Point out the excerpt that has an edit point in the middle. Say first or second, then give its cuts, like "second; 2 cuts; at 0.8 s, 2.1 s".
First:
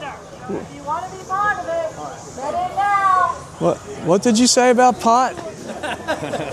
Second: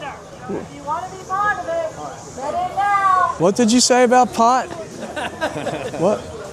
second; 1 cut; at 3.3 s